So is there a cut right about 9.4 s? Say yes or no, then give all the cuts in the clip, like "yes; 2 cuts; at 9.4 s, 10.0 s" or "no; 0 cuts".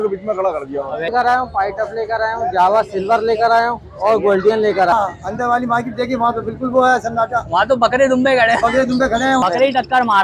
yes; 3 cuts; at 1.1 s, 4.9 s, 9.4 s